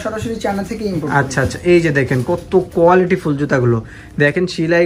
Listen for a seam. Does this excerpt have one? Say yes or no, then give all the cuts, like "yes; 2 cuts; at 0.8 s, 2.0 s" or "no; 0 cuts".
no; 0 cuts